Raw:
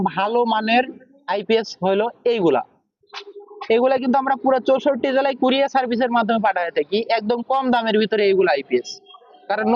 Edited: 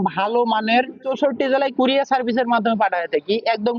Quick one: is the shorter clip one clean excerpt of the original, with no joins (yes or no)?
no